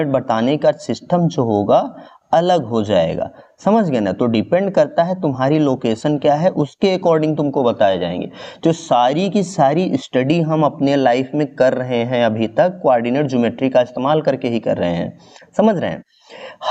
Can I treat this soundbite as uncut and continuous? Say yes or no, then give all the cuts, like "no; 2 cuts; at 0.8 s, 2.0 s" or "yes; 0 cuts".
yes; 0 cuts